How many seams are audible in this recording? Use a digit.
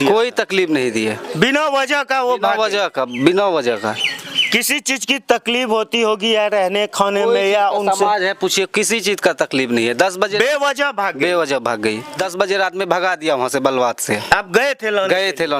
1